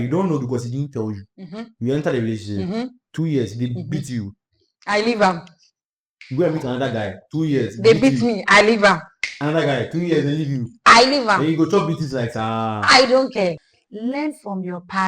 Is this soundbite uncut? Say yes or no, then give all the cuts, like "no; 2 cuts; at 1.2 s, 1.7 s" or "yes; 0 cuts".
no; 1 cut; at 13.6 s